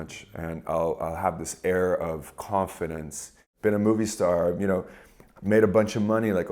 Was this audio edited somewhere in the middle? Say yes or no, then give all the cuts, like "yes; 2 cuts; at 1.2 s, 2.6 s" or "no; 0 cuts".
yes; 1 cut; at 3.4 s